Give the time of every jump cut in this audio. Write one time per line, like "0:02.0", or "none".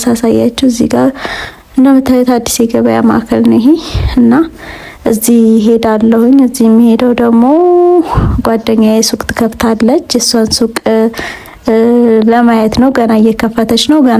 none

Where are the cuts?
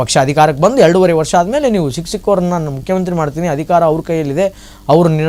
none

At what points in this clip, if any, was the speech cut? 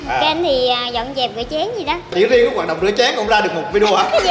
0:02.1

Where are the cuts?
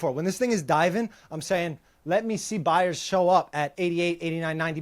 0:03.7

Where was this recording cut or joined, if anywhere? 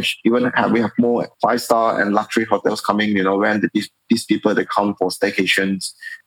0:01.3

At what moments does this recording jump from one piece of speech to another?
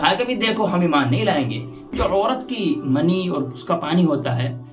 0:01.9

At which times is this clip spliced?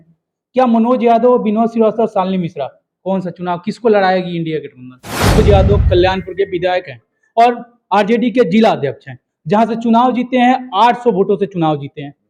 0:05.4

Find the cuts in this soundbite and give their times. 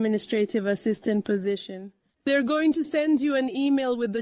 none

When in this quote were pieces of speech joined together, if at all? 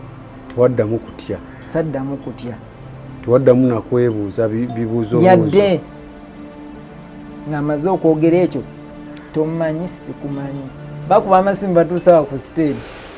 0:11.0

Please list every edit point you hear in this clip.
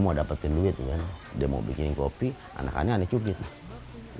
0:01.2

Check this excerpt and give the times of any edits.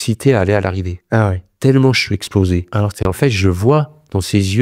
0:03.0

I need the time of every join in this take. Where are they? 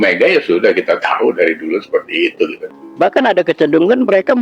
0:02.7

